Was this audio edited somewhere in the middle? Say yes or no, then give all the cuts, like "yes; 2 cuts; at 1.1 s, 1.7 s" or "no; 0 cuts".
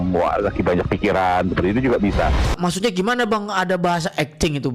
yes; 1 cut; at 2.5 s